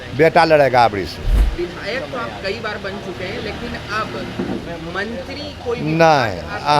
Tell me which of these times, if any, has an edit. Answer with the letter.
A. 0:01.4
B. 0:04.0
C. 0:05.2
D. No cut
A